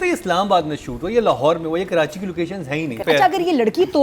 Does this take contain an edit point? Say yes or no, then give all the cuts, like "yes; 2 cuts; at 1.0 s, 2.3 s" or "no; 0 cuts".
yes; 1 cut; at 3.0 s